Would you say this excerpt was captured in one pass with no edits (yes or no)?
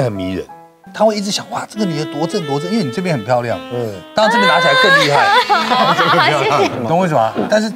yes